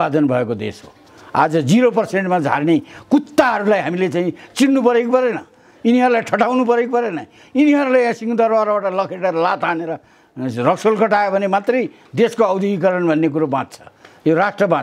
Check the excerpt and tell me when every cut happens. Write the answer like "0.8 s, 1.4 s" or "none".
none